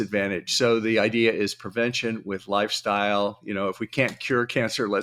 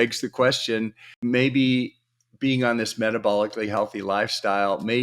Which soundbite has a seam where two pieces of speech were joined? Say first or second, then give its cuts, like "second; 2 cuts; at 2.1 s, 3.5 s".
second; 1 cut; at 1.0 s